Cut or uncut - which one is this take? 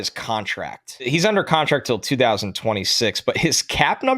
cut